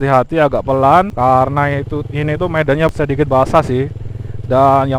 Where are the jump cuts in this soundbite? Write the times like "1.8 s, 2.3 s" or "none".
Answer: 1.1 s, 2.9 s